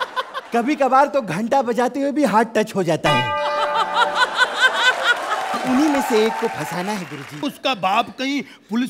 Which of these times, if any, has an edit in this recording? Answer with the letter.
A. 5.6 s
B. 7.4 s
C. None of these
B